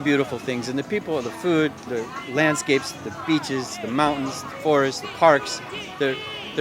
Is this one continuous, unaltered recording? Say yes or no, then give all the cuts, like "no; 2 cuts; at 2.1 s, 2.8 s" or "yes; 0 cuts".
yes; 0 cuts